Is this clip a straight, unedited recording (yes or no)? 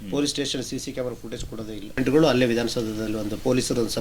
no